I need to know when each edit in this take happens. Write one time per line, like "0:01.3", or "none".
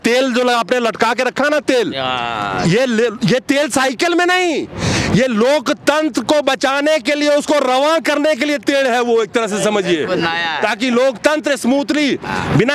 none